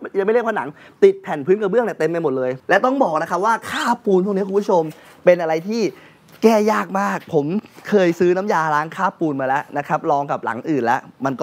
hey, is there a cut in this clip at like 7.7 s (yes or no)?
no